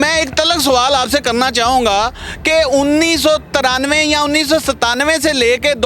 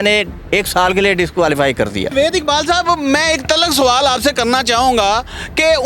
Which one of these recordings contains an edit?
second; 1 cut; at 2.1 s

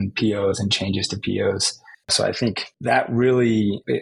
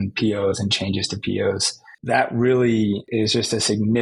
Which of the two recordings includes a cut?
second; 2 cuts; at 1.9 s, 3.1 s

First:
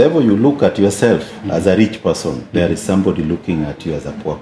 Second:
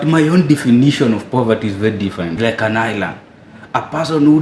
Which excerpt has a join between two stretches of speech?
second; 1 cut; at 2.3 s

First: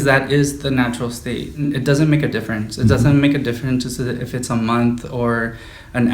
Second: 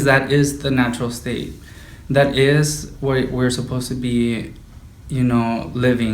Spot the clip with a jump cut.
first; 1 cut; at 1.6 s

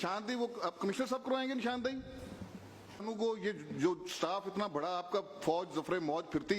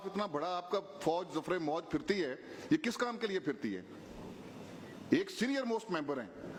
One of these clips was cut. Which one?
first; 1 cut; at 3.0 s

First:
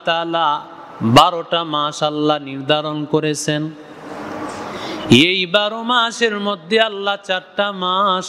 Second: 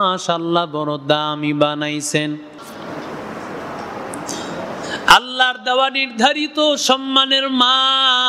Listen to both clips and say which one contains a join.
second; 1 cut; at 2.6 s

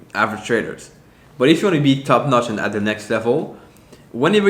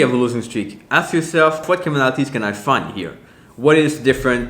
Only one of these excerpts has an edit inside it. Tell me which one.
second; 1 cut; at 1.6 s

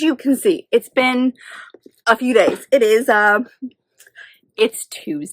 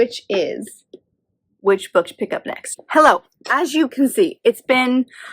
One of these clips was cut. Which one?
second; 1 cut; at 2.6 s

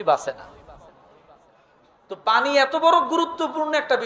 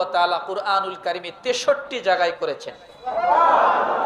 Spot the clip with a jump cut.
first; 1 cut; at 1.7 s

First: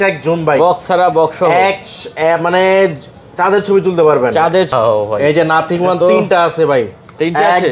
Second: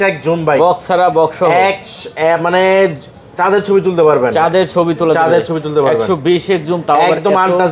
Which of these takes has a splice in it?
first; 1 cut; at 4.7 s

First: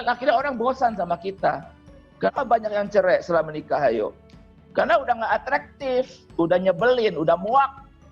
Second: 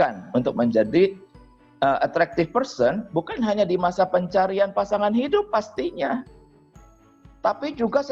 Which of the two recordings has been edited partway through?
first; 1 cut; at 2.3 s

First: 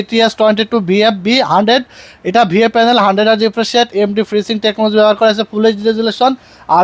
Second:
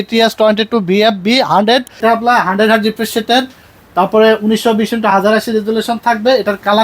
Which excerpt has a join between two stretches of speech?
second; 1 cut; at 1.9 s

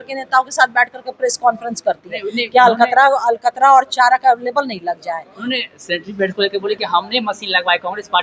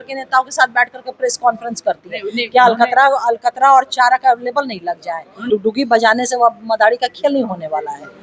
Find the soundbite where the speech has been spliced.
second; 1 cut; at 5.4 s

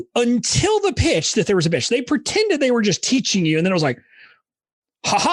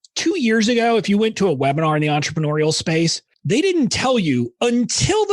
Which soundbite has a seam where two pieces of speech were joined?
second; 1 cut; at 3.3 s

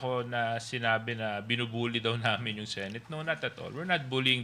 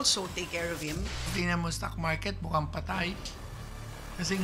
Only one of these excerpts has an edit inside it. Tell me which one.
second; 1 cut; at 1.3 s

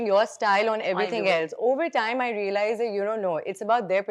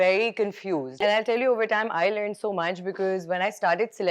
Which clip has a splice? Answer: second; 1 cut; at 0.9 s

